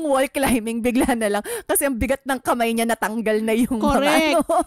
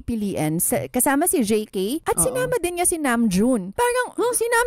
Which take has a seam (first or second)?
second